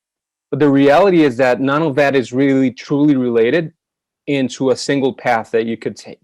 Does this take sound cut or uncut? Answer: uncut